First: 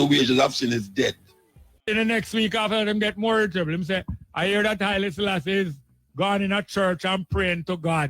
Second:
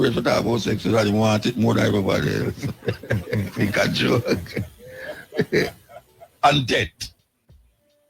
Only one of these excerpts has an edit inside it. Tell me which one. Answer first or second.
first